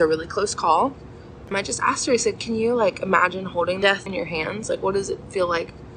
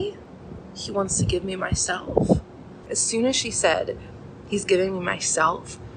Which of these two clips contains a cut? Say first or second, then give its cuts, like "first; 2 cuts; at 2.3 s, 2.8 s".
first; 2 cuts; at 1.5 s, 3.9 s